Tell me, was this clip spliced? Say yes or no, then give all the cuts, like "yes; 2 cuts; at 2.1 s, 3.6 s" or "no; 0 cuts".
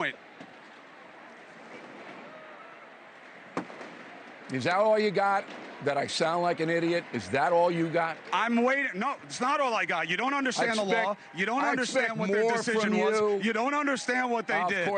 no; 0 cuts